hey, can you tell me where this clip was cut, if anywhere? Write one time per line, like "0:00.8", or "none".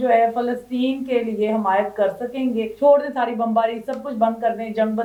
none